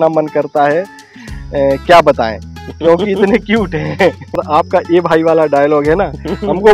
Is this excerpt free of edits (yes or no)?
no